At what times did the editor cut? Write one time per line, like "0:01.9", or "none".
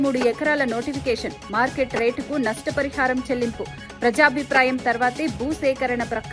none